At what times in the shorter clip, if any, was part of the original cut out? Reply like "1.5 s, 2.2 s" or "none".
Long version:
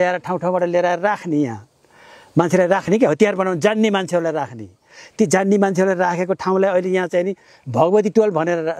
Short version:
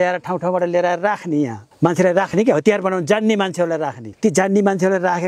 1.6 s, 4.0 s